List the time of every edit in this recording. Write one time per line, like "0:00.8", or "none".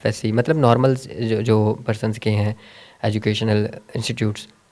none